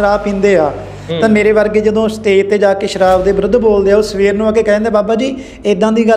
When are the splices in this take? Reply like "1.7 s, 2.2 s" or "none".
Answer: none